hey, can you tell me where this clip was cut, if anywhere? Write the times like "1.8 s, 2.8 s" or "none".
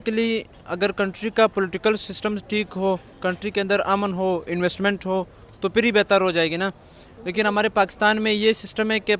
none